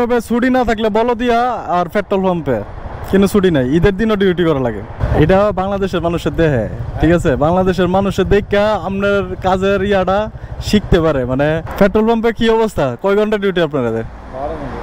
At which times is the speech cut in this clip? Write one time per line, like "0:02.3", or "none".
0:04.9
0:11.7